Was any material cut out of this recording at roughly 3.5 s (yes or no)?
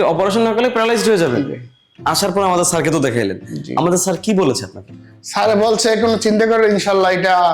no